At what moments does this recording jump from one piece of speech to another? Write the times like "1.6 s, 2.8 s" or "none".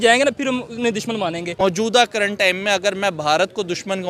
none